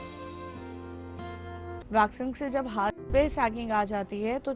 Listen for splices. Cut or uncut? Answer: cut